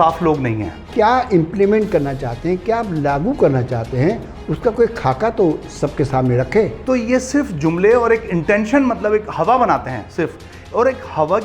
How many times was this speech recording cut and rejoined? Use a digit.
2